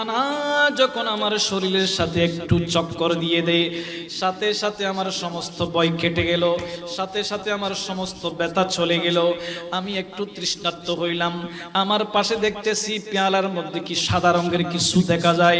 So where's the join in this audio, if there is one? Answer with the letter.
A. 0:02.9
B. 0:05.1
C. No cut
C